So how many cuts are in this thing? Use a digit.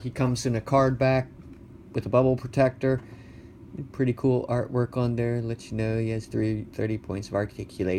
1